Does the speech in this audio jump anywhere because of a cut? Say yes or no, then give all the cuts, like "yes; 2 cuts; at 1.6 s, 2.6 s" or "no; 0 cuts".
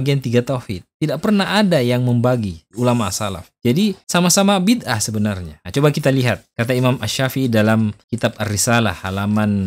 yes; 1 cut; at 5.5 s